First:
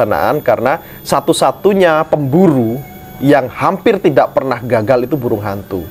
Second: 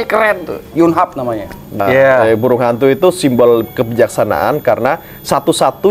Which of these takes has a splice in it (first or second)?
second